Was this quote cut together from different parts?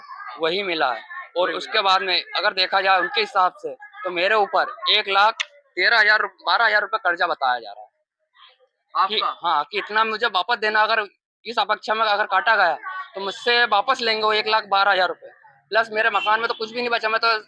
no; 0 cuts

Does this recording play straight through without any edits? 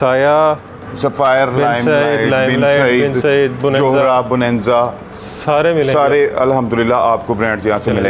yes; 0 cuts

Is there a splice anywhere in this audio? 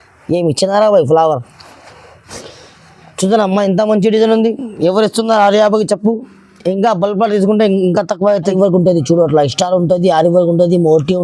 yes; 1 cut; at 8.5 s

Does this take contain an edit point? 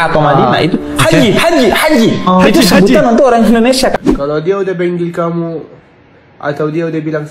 yes; 1 cut; at 3.9 s

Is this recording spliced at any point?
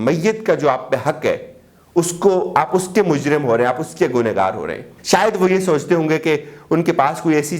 yes; 1 cut; at 4.9 s

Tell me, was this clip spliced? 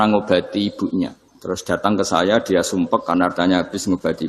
yes; 1 cut; at 1.3 s

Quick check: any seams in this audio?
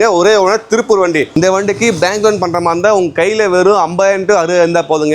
yes; 1 cut; at 1.3 s

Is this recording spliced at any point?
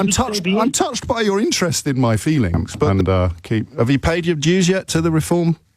yes; 1 cut; at 2.9 s

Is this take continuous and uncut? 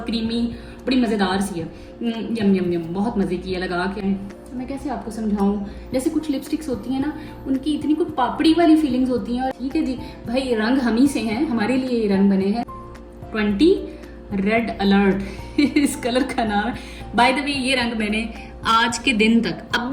no; 3 cuts; at 4.0 s, 9.5 s, 12.7 s

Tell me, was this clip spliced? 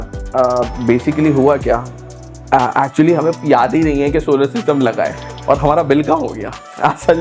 no; 0 cuts

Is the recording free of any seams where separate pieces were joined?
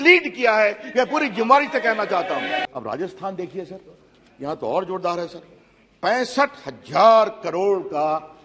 no; 1 cut; at 2.6 s

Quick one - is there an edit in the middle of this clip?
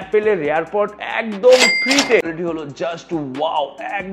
yes; 1 cut; at 2.3 s

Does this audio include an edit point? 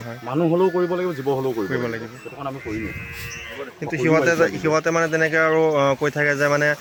no; 0 cuts

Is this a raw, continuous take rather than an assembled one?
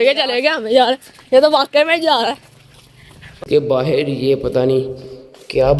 no; 1 cut; at 3.4 s

